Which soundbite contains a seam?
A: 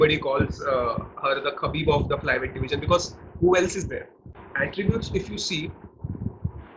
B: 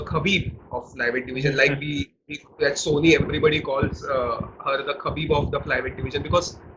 A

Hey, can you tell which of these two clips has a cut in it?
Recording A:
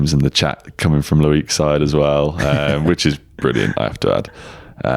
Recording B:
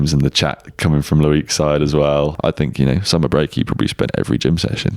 B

